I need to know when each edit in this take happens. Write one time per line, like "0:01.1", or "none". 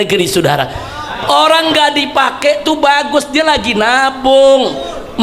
none